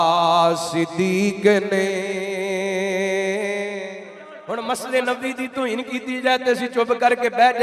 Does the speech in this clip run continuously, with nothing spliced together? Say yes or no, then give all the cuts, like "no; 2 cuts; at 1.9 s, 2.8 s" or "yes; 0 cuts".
no; 1 cut; at 4.3 s